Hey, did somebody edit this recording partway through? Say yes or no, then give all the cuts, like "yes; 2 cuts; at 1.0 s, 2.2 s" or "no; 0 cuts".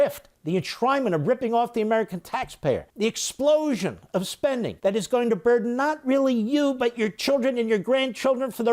yes; 2 cuts; at 2.9 s, 4.7 s